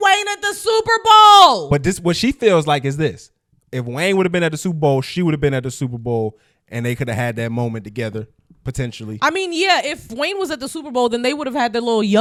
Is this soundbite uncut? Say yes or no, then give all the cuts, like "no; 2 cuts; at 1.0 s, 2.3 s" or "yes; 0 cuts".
yes; 0 cuts